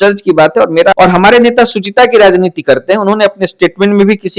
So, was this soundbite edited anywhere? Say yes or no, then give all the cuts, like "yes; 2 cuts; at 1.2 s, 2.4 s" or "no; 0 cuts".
yes; 1 cut; at 0.9 s